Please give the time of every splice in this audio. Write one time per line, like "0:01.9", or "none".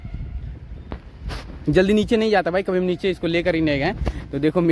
none